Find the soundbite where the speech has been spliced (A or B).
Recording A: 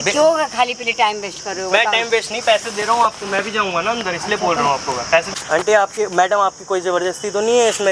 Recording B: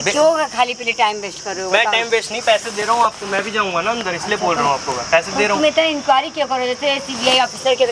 A